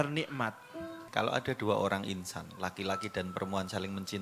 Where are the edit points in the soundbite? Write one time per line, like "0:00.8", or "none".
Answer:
0:01.0